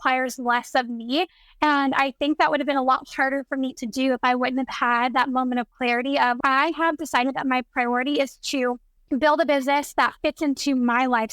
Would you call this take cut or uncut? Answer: cut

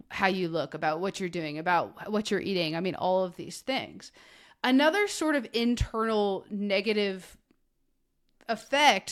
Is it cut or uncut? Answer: uncut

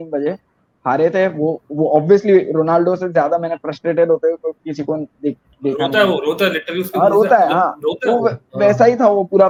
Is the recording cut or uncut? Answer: uncut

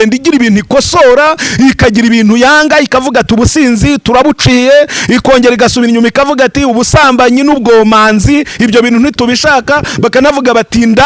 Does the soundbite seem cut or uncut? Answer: uncut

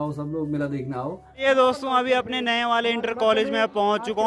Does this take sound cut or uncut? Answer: cut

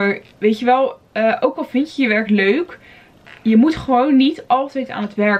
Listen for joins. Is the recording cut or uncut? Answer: uncut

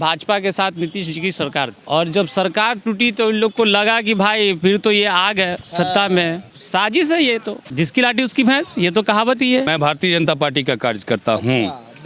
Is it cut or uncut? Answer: cut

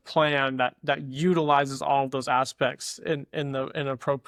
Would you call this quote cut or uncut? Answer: uncut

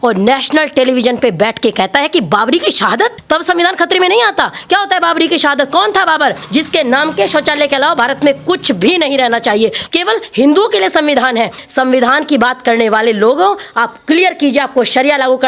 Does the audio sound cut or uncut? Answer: cut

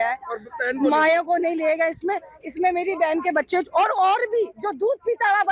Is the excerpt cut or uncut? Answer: uncut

